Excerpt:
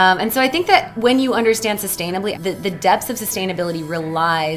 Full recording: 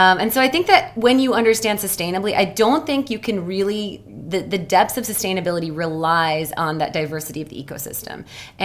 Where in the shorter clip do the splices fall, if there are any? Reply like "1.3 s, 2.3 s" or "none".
2.3 s